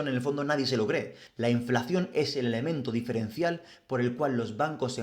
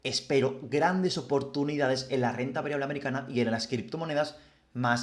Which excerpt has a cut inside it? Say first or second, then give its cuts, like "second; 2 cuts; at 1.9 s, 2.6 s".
first; 1 cut; at 1.2 s